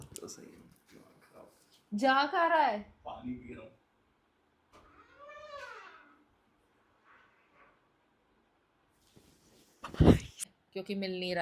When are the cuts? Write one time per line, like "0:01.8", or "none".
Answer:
0:10.4